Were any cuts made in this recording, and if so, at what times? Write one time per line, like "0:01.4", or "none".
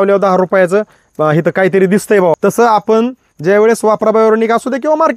0:02.3